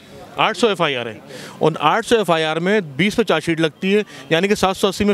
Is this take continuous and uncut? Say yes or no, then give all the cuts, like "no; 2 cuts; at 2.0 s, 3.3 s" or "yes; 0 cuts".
yes; 0 cuts